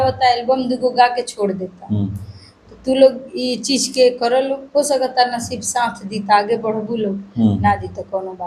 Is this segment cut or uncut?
uncut